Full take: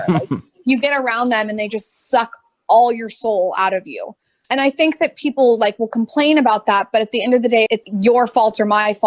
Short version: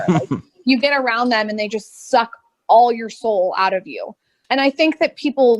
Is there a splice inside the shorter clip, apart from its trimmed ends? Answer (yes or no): no